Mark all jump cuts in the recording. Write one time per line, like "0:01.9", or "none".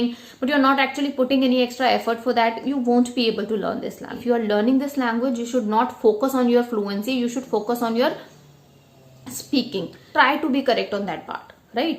0:04.2
0:10.0